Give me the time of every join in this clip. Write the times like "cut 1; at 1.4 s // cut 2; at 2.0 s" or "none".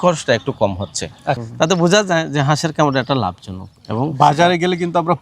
cut 1; at 1.4 s